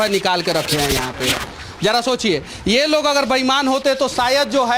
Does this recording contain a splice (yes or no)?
no